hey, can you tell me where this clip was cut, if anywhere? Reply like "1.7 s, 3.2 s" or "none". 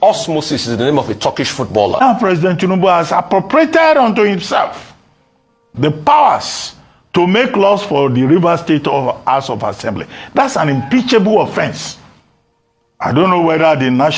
2.0 s